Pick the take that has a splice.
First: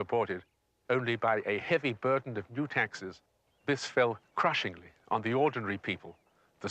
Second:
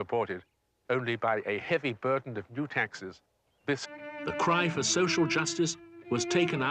first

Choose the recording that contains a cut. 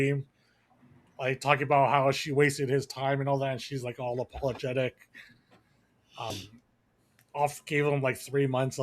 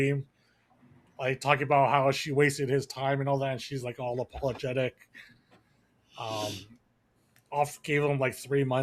first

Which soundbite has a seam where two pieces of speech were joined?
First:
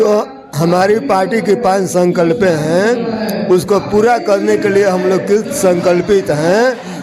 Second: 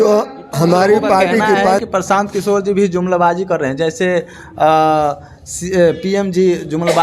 second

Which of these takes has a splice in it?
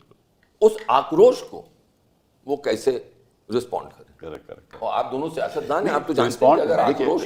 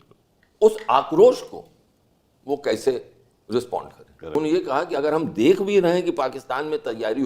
second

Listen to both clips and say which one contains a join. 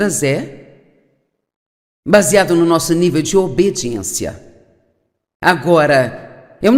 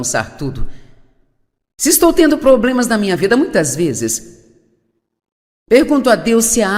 first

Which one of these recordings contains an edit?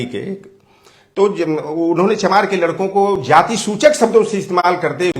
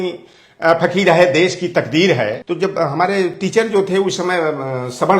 second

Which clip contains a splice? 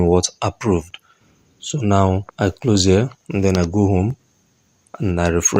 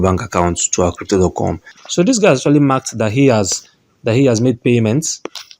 second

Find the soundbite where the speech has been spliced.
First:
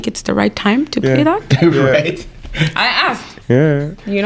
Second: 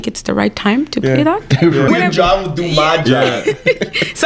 second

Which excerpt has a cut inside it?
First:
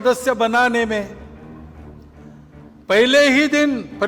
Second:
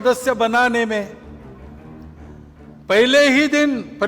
second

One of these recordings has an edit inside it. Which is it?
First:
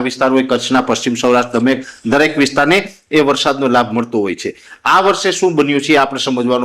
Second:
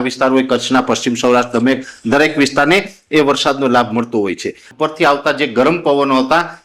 second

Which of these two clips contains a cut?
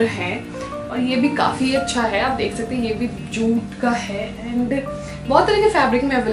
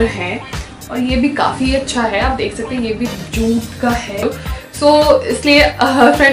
second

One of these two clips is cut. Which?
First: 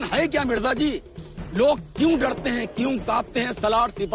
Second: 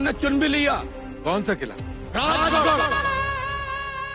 second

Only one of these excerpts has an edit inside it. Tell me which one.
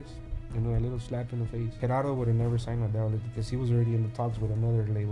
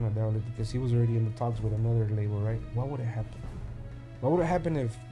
first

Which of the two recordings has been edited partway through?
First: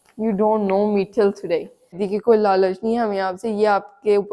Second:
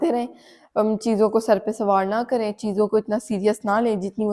first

